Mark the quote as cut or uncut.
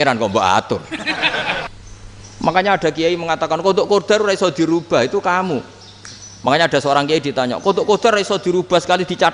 cut